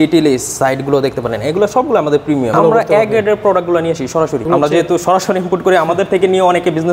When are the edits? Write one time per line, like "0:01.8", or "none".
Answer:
0:02.5
0:04.4

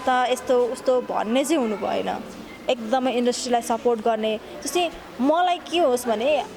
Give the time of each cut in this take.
none

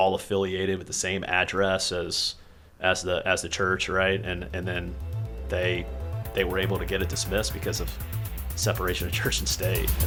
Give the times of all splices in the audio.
none

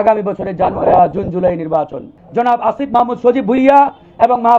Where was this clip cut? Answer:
0:02.2

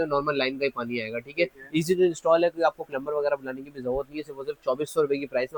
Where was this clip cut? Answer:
none

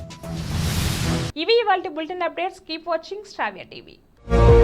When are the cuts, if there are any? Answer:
none

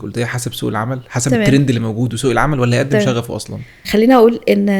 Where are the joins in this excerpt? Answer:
0:03.8

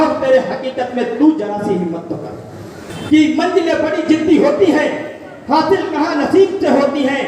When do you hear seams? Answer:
0:02.9

